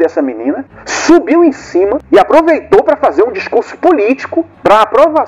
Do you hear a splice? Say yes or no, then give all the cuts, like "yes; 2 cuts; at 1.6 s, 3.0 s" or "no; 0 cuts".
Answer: no; 0 cuts